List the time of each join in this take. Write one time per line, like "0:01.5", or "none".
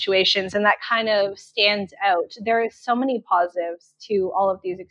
none